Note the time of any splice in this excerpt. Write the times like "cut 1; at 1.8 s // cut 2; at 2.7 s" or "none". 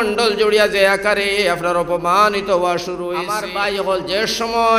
cut 1; at 3.4 s